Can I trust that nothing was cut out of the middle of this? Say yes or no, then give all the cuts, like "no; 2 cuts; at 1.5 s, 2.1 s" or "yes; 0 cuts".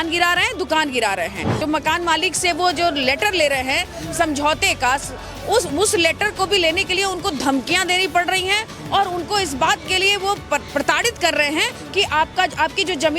no; 1 cut; at 1.6 s